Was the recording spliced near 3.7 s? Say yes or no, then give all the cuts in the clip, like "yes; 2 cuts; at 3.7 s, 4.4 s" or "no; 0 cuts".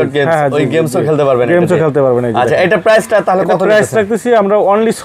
no; 0 cuts